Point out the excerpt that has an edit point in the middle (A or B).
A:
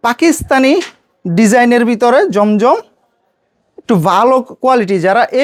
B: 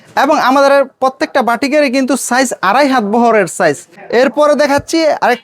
B